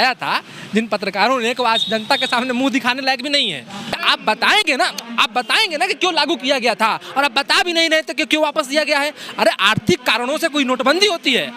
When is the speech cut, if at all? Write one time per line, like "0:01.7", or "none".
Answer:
0:03.9